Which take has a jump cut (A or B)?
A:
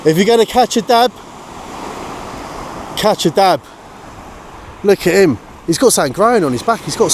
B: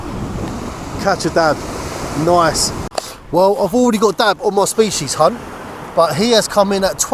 B